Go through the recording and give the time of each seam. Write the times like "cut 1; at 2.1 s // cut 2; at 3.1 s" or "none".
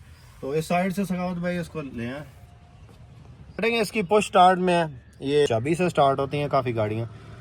cut 1; at 3.6 s // cut 2; at 5.4 s